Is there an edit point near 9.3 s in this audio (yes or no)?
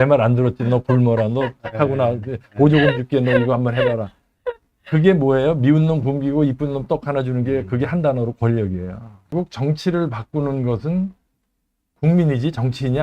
yes